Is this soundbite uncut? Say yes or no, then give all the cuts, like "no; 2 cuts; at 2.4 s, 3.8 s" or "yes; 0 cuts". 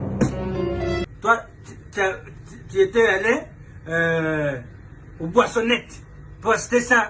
no; 1 cut; at 1.0 s